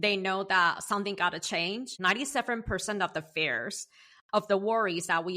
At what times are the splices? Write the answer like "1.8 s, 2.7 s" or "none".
1.9 s